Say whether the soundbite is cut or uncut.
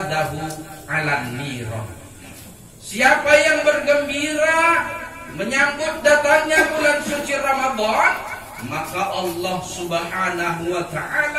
uncut